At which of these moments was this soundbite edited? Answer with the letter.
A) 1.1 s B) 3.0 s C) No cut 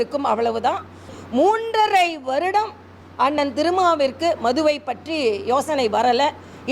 A